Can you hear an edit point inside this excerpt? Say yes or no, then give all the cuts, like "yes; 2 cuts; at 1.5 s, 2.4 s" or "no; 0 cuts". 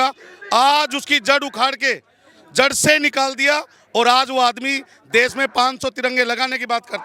no; 0 cuts